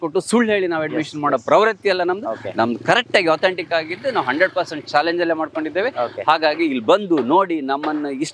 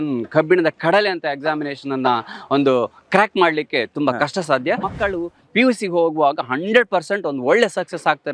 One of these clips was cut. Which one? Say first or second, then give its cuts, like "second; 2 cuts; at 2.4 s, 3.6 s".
second; 1 cut; at 4.9 s